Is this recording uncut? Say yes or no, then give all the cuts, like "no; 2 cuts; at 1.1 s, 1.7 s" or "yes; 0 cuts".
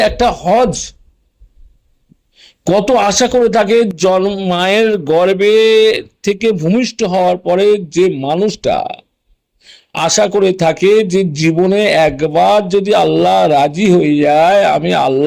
yes; 0 cuts